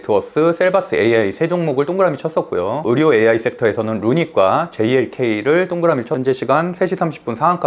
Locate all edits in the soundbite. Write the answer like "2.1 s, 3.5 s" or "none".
6.2 s